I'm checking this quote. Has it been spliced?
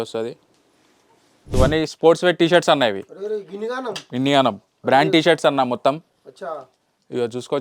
yes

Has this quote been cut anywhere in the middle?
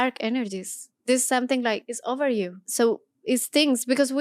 yes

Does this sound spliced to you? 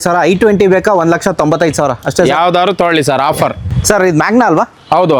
no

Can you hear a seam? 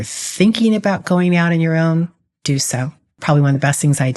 yes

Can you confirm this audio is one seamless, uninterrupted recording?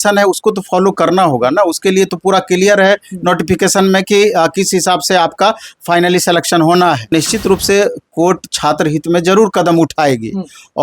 no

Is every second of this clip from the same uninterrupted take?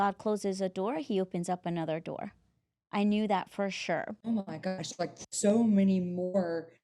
no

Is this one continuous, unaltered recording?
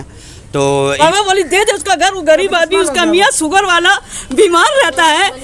no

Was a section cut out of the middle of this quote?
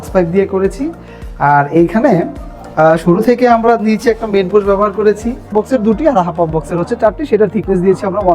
yes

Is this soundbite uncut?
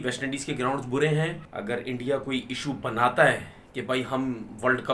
no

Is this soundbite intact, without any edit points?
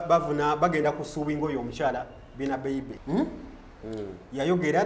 no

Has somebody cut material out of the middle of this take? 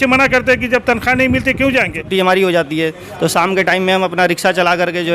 yes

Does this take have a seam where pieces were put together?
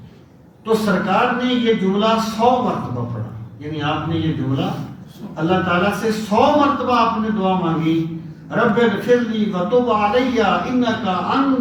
no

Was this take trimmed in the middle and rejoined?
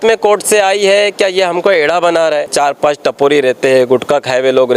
yes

